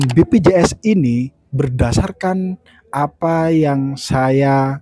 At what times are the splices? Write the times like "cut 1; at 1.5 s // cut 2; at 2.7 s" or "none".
cut 1; at 1.4 s